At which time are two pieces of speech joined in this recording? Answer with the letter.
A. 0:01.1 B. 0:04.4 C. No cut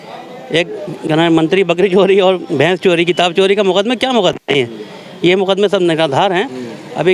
C